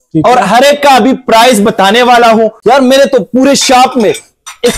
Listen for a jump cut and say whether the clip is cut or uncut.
cut